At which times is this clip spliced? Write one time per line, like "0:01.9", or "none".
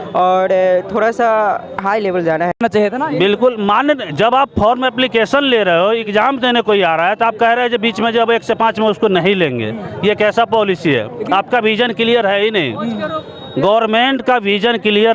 0:02.6

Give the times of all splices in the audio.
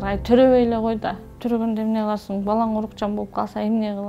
0:01.3

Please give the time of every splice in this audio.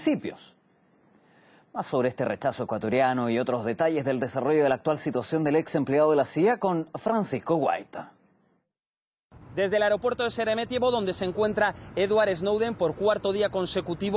0:06.3

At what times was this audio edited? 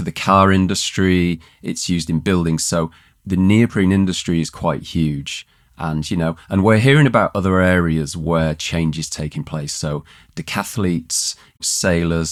none

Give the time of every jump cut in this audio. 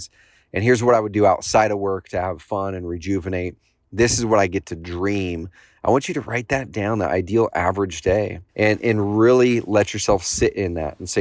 0:08.4

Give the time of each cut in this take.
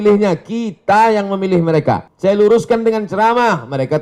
0:02.1

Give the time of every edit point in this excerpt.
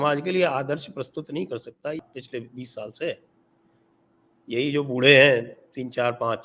0:02.0

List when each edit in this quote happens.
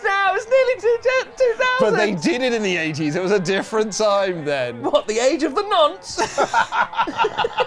none

